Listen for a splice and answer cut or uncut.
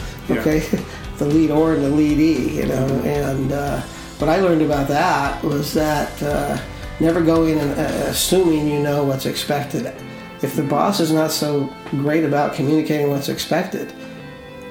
uncut